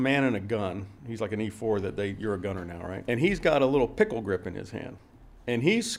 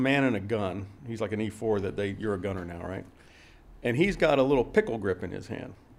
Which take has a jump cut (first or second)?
first